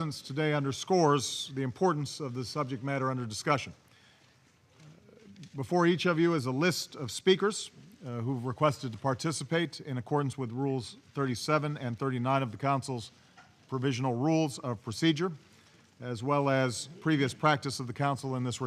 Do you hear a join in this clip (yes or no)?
yes